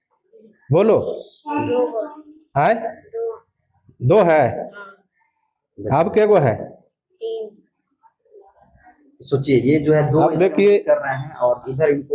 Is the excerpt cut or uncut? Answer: uncut